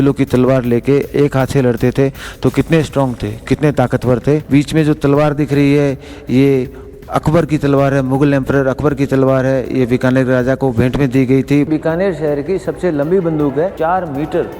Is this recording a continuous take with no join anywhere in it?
no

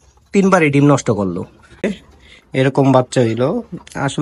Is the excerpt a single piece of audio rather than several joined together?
no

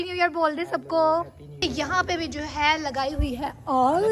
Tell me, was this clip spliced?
yes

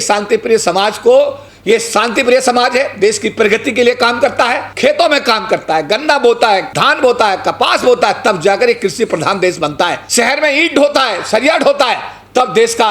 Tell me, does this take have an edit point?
yes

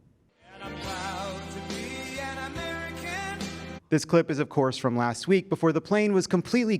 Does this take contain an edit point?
yes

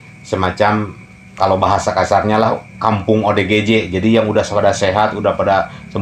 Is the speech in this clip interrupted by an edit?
no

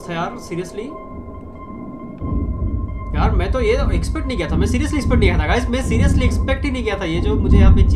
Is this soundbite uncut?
yes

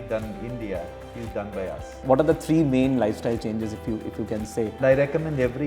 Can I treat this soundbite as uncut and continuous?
no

